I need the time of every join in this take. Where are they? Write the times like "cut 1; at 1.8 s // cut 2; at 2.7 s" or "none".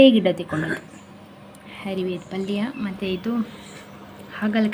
none